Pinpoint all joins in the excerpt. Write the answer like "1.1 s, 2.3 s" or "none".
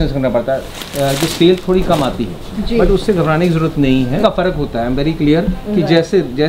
4.2 s

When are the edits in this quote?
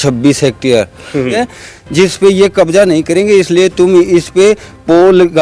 1.4 s

